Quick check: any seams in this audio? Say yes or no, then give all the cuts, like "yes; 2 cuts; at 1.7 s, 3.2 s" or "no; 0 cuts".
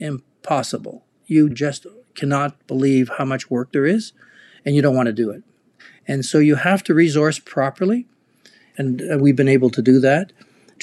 yes; 1 cut; at 8.6 s